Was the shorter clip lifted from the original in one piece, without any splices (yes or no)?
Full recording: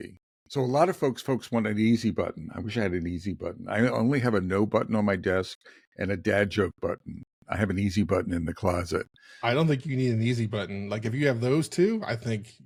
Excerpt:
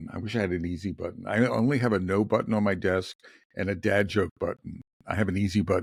yes